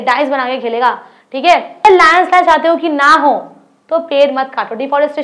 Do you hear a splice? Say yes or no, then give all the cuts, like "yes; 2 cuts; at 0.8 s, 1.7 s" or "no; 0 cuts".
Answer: yes; 1 cut; at 1.8 s